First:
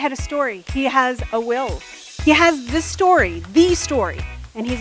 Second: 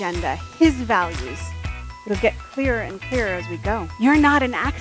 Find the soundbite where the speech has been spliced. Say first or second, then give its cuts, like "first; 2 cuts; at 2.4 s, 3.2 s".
second; 1 cut; at 3.9 s